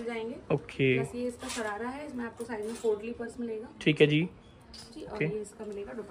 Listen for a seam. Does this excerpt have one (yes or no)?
no